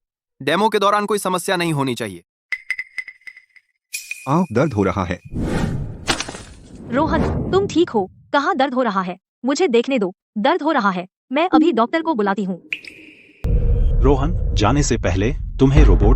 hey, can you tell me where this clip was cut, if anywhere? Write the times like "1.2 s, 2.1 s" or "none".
13.5 s